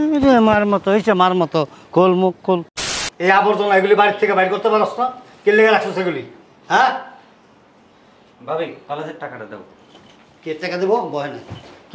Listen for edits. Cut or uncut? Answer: cut